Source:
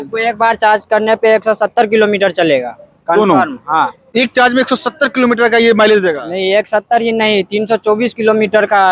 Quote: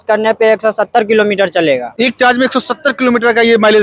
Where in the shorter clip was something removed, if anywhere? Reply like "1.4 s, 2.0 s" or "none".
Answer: 1.9 s